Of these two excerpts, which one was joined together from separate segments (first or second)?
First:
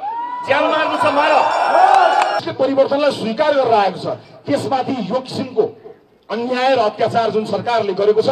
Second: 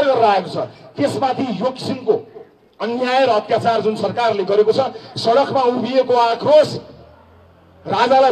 first